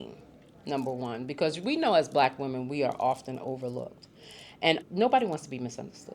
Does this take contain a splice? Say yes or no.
no